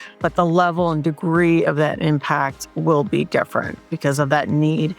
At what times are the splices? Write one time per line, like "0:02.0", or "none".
0:03.8